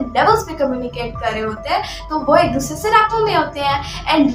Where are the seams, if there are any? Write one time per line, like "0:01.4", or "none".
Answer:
none